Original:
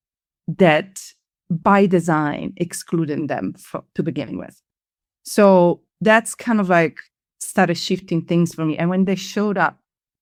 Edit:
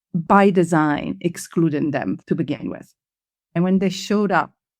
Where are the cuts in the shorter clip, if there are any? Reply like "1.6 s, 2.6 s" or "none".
2.2 s, 3.5 s